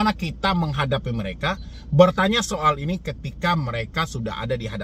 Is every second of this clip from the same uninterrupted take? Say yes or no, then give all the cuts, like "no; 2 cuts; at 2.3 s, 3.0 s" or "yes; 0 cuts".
yes; 0 cuts